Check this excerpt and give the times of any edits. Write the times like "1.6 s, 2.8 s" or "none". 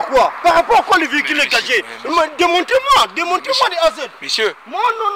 none